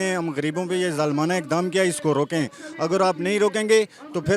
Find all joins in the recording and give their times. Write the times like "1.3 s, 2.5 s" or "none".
none